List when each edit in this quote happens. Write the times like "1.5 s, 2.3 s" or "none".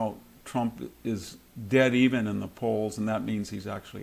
none